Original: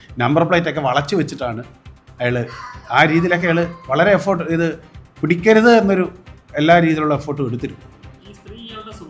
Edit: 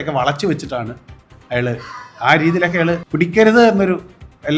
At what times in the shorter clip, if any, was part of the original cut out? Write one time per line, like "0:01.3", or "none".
0:03.1